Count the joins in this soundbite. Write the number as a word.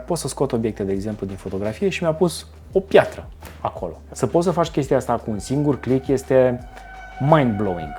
one